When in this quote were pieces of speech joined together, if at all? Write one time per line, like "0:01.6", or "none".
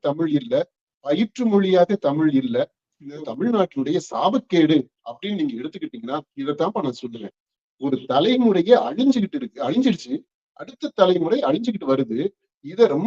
0:03.2